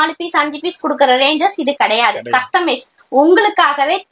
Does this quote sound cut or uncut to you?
uncut